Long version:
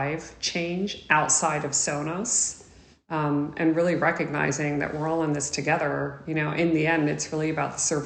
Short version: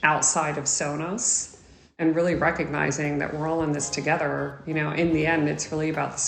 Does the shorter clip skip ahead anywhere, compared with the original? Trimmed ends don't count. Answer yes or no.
yes